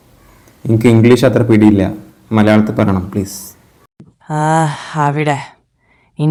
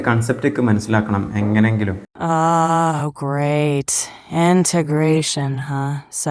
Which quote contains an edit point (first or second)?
second